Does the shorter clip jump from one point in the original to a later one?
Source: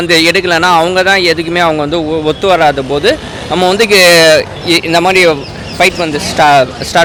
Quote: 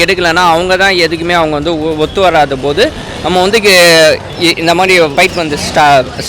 yes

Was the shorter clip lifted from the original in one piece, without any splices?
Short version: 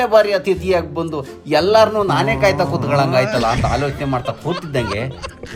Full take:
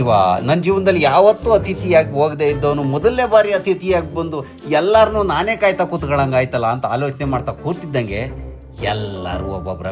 yes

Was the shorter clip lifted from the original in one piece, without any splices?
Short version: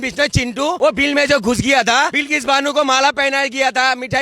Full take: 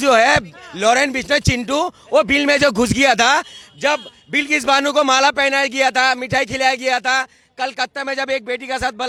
no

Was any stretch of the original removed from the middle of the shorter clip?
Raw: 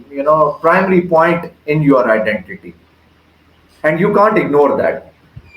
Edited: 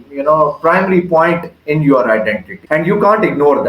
yes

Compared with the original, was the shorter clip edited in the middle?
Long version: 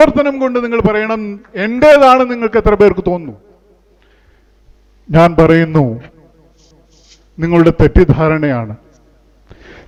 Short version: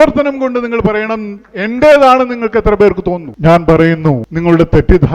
yes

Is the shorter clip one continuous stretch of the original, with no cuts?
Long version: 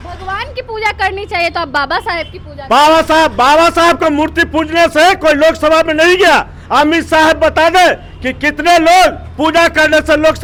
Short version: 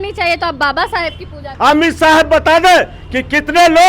no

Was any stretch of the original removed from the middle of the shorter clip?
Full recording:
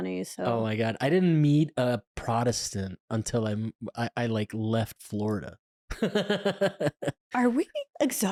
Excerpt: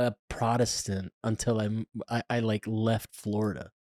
no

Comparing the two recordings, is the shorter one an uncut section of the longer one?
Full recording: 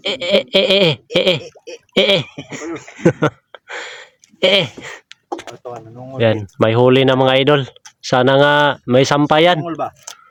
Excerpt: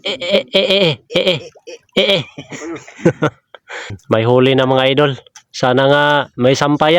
no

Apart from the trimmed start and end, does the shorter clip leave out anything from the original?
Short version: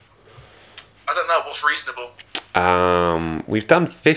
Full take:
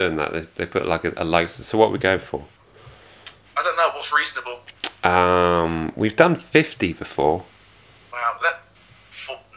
no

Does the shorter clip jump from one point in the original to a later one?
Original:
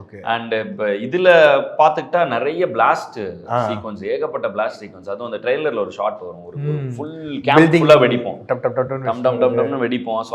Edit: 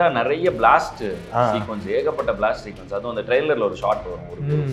no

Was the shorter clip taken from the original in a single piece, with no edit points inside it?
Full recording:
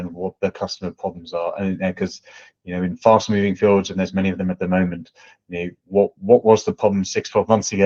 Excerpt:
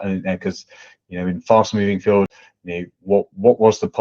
no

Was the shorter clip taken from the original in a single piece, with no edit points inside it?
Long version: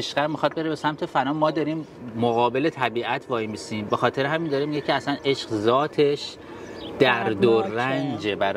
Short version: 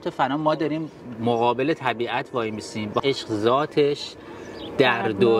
no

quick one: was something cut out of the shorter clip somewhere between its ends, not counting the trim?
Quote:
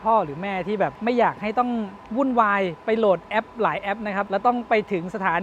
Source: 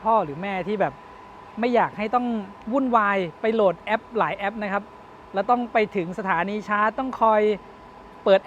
yes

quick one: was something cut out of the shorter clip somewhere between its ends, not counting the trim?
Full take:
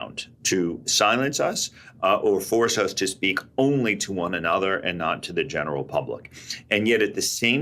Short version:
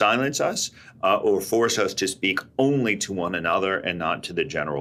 no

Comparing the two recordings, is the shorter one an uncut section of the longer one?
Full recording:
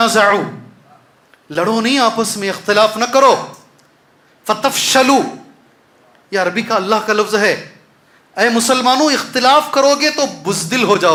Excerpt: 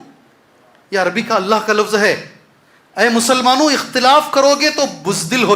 yes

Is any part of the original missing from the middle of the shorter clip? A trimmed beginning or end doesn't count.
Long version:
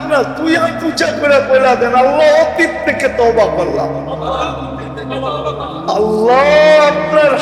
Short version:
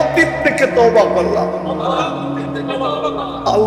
no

